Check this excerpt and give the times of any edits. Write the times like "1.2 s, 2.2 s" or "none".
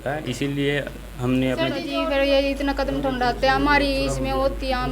1.9 s